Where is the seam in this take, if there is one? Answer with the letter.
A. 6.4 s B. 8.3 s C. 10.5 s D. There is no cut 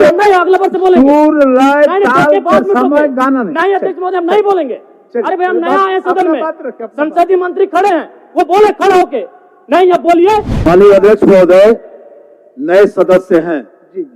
C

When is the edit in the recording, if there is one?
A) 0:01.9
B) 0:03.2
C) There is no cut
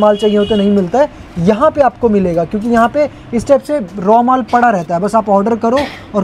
C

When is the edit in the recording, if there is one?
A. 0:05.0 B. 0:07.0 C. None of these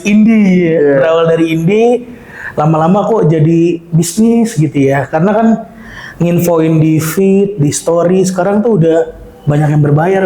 C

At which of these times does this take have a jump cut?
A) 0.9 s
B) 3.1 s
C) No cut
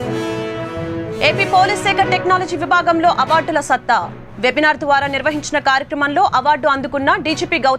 A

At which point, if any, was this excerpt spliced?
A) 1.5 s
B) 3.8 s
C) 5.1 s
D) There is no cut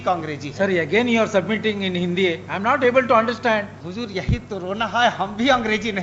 B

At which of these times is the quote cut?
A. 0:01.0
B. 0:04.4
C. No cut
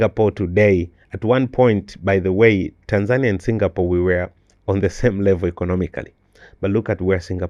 C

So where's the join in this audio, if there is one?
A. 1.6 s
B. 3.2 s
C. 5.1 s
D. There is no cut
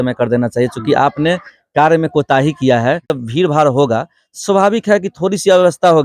B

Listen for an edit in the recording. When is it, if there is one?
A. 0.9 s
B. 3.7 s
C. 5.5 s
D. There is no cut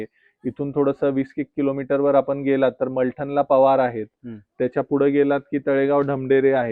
D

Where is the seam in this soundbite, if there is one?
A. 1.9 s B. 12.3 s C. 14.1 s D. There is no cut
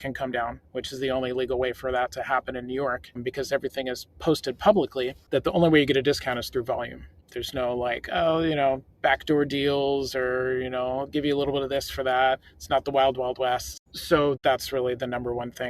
C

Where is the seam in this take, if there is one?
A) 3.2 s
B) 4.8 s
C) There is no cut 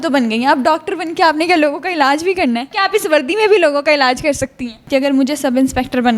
B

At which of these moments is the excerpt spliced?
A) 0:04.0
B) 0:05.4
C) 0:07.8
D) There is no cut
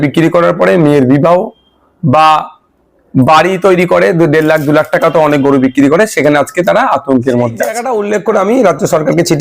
C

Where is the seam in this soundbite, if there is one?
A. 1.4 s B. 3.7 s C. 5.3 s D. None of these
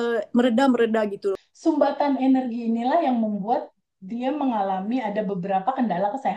A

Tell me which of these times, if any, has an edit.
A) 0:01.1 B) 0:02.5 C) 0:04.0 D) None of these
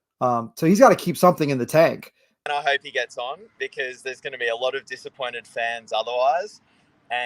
B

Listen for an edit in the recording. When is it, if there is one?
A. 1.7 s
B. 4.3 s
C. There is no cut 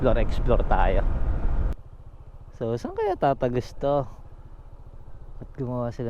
A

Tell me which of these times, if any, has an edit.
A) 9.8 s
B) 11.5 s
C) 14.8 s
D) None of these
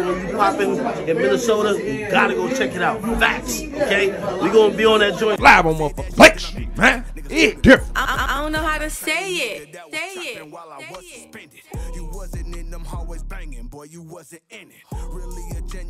D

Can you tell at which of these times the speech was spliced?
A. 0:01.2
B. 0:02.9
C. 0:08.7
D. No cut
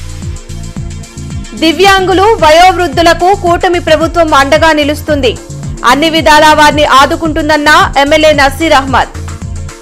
A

